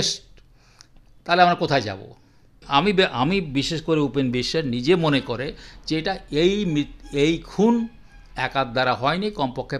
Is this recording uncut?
no; 1 cut; at 2.6 s

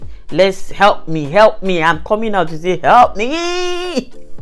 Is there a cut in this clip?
no; 0 cuts

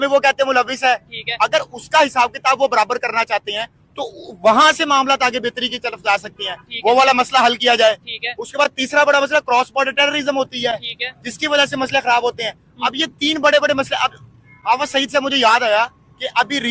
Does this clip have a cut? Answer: no; 0 cuts

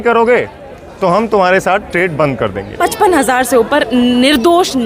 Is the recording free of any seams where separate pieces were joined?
no; 1 cut; at 2.6 s

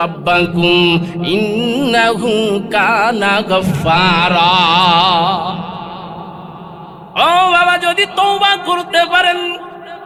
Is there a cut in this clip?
no; 0 cuts

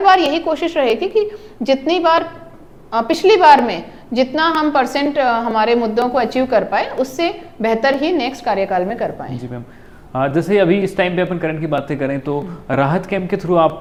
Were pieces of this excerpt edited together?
no; 0 cuts

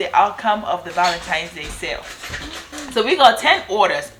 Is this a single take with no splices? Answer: yes; 0 cuts

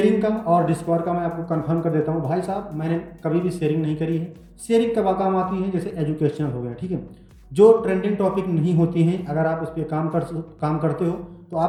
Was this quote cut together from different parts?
no; 0 cuts

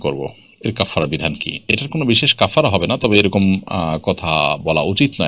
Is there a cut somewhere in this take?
no; 0 cuts

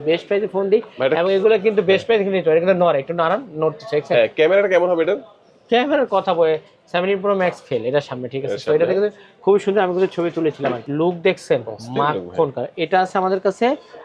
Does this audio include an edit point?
yes; 1 cut; at 10.8 s

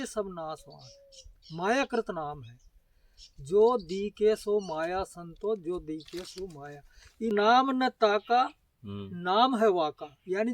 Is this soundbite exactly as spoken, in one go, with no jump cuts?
no; 1 cut; at 7.3 s

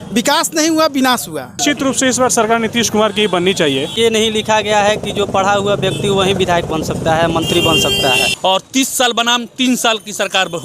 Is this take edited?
yes; 3 cuts; at 1.6 s, 3.9 s, 8.3 s

